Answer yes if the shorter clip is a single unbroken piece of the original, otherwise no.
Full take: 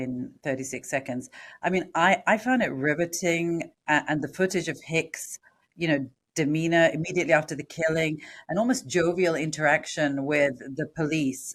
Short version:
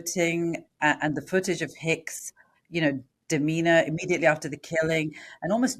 yes